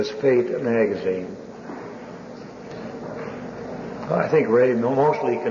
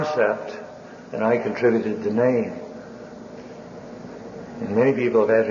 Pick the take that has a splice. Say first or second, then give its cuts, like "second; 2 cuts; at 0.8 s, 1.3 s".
second; 1 cut; at 3.8 s